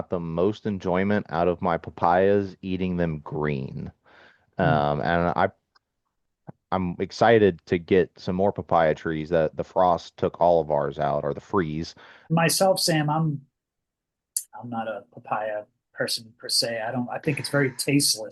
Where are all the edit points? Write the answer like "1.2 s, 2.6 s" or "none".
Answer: 12.3 s